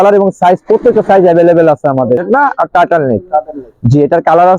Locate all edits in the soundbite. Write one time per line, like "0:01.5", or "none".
0:02.2